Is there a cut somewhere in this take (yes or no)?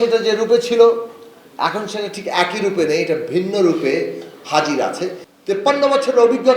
yes